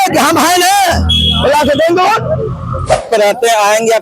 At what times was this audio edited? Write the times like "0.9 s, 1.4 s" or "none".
3.1 s